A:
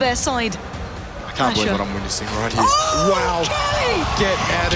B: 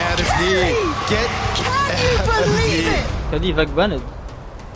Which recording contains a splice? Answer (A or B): B